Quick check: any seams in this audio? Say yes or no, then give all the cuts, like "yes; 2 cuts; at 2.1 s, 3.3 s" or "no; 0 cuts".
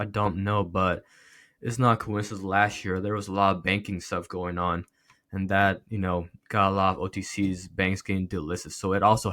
no; 0 cuts